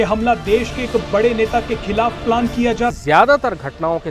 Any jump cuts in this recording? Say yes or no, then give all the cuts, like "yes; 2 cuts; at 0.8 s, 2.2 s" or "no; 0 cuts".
yes; 1 cut; at 2.9 s